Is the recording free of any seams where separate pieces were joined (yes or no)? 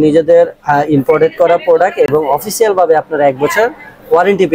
yes